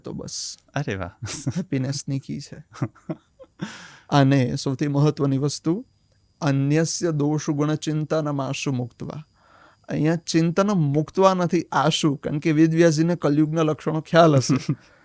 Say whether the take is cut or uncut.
cut